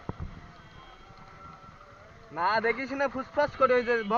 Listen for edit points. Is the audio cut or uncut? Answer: uncut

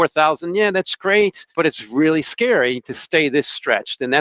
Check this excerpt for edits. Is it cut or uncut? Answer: cut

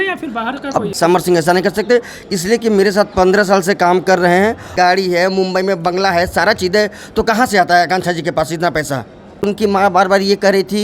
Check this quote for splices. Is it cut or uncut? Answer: cut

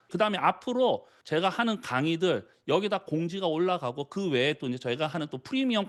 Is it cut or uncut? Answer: uncut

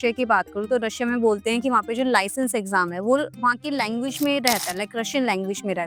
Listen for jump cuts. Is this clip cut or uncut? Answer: uncut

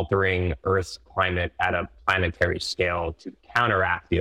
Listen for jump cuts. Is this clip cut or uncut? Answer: uncut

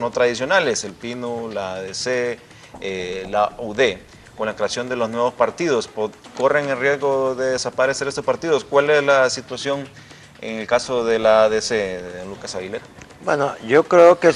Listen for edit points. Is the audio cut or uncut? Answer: uncut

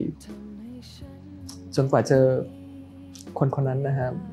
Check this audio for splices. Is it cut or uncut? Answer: uncut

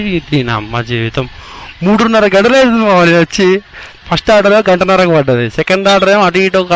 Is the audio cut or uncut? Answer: uncut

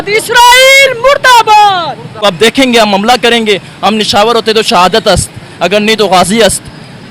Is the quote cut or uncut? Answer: cut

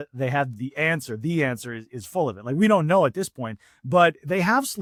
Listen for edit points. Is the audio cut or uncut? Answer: uncut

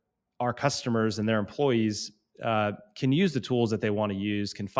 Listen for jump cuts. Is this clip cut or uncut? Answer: uncut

